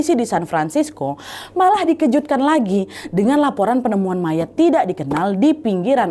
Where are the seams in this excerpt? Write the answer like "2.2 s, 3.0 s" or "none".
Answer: none